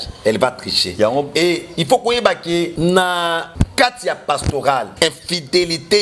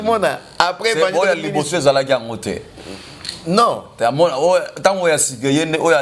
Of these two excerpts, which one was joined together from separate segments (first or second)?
first